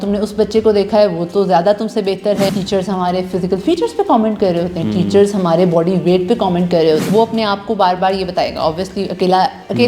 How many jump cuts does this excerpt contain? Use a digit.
2